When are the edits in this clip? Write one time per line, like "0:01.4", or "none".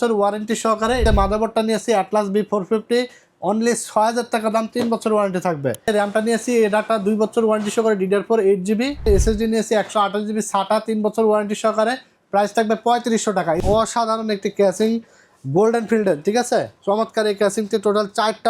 0:01.0
0:05.9
0:09.1
0:13.6

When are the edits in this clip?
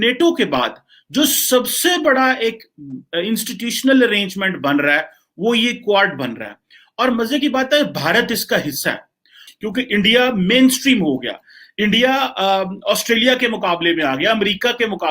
0:09.4

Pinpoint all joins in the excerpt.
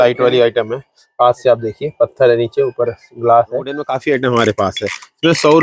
0:03.8

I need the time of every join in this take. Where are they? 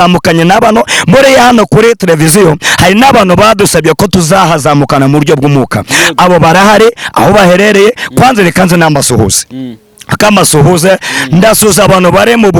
none

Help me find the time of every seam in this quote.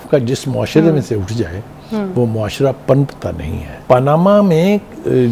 0:03.7

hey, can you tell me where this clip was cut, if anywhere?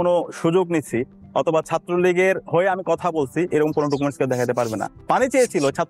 0:04.9

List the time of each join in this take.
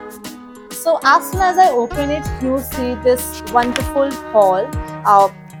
none

